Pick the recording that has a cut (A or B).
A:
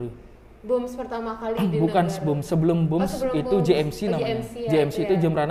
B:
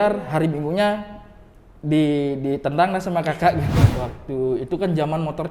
B